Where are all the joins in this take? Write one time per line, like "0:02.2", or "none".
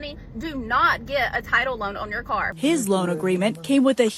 0:02.5